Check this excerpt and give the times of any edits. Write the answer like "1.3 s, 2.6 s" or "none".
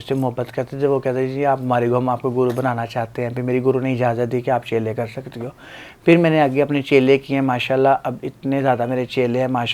none